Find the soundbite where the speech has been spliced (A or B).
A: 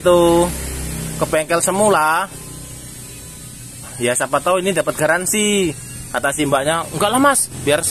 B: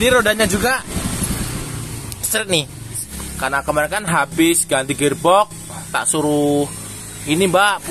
B